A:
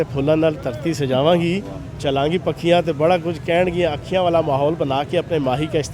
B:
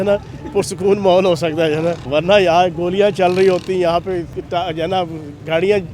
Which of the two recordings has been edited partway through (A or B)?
B